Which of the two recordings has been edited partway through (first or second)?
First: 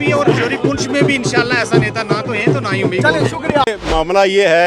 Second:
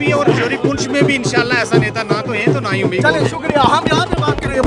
first